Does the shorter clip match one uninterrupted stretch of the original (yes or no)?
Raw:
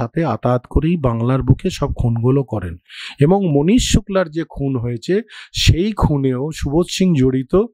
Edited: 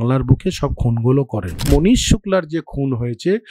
no